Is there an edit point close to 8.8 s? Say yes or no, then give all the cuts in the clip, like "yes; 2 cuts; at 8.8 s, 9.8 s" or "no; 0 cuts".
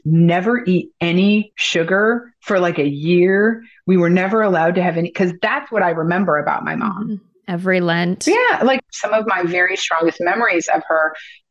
yes; 1 cut; at 8.8 s